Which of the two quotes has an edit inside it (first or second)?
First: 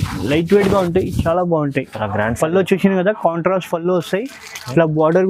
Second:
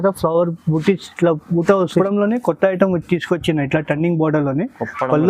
second